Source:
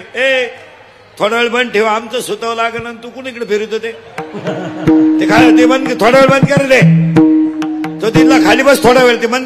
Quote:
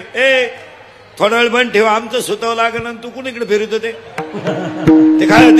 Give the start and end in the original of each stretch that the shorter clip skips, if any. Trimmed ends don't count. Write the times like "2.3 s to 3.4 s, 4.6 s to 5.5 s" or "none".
none